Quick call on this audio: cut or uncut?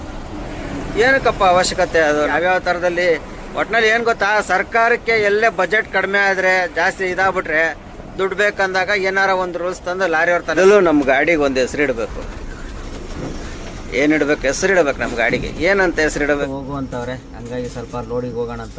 cut